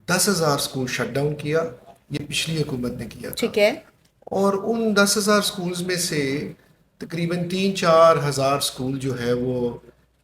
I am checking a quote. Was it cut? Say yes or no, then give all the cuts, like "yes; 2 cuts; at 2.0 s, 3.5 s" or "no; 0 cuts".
no; 0 cuts